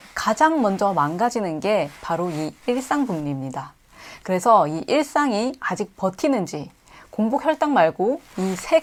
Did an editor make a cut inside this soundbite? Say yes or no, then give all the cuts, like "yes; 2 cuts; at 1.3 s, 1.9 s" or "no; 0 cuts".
no; 0 cuts